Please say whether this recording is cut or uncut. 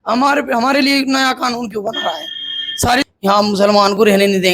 cut